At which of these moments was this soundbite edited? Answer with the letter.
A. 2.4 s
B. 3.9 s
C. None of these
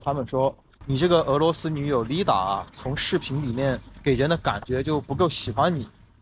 B